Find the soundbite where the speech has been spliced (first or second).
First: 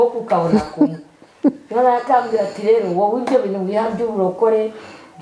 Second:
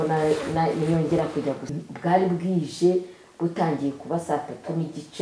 second